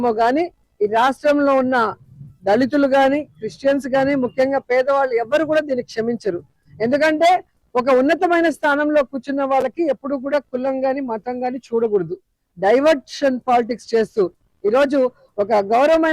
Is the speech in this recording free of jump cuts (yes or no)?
no